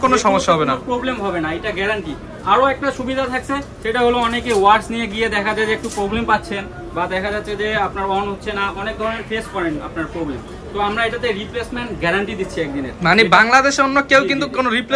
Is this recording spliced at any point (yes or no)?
no